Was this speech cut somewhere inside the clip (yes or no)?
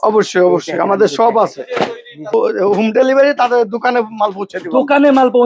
yes